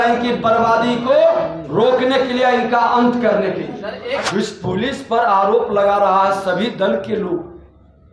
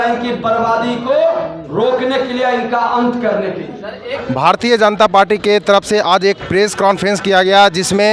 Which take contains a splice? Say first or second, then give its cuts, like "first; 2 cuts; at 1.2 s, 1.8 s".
first; 1 cut; at 4.2 s